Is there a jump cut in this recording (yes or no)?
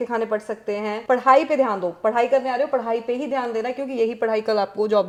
no